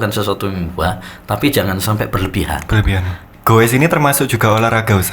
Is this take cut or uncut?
cut